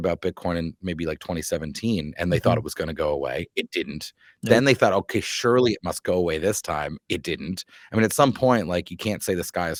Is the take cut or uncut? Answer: uncut